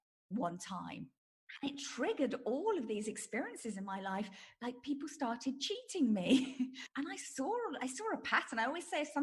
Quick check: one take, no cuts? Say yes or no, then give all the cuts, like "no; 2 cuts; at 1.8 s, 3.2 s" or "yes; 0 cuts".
no; 2 cuts; at 1.2 s, 6.8 s